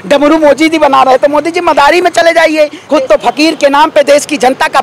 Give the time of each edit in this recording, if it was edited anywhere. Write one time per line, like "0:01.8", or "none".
0:02.8